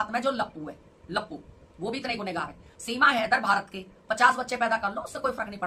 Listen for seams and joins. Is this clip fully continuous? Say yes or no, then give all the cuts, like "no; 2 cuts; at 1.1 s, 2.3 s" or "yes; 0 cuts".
yes; 0 cuts